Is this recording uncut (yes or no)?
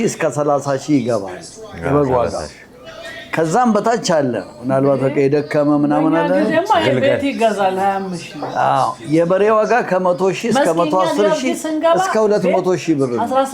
yes